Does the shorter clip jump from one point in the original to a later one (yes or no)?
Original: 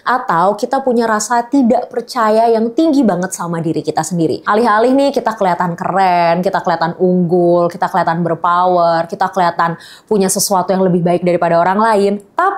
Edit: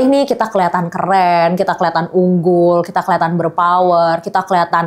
no